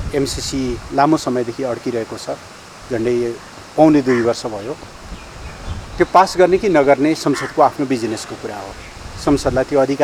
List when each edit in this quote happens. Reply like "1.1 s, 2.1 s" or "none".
none